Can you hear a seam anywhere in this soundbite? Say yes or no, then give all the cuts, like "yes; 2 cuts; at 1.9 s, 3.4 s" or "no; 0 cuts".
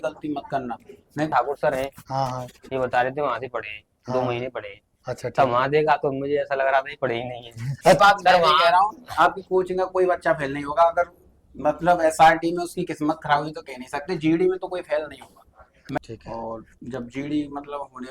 yes; 3 cuts; at 1.3 s, 8.0 s, 16.0 s